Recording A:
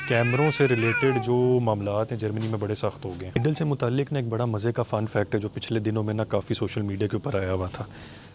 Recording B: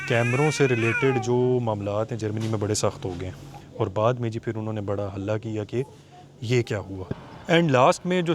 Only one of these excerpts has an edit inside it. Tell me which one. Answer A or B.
B